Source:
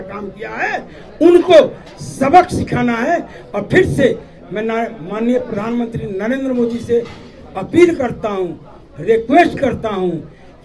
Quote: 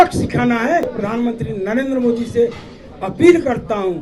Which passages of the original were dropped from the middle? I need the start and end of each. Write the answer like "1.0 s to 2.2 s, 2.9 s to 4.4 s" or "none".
3.3 s to 5.5 s